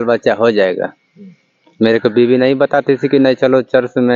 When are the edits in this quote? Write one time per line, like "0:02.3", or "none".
none